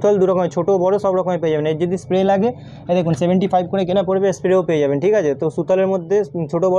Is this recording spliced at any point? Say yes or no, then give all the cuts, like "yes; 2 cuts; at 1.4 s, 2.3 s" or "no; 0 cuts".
no; 0 cuts